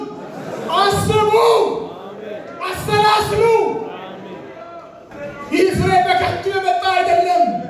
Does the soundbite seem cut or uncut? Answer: cut